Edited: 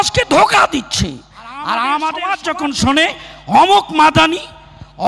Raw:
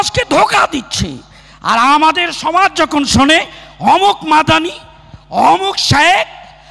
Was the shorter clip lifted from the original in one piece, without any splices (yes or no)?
no